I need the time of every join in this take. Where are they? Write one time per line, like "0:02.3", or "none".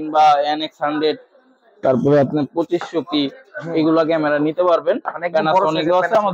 none